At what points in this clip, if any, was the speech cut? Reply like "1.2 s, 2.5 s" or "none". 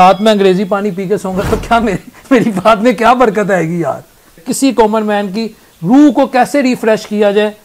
4.5 s